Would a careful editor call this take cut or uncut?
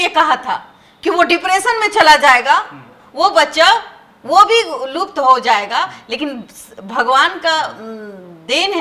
uncut